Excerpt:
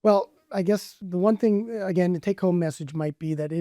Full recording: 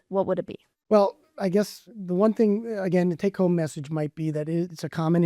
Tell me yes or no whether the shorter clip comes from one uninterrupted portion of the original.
no